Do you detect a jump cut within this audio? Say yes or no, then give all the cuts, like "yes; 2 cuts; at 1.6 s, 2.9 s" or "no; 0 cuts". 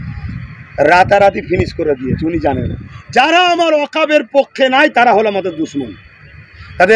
yes; 1 cut; at 2.7 s